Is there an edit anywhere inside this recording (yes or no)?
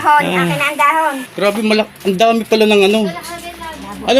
yes